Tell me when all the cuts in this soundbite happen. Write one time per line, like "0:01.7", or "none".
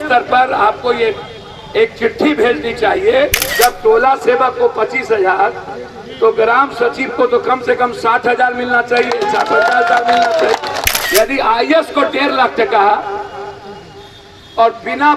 0:03.4
0:11.0